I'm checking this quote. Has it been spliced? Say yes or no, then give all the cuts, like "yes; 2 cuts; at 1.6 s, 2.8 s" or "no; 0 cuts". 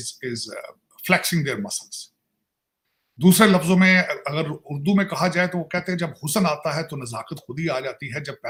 no; 0 cuts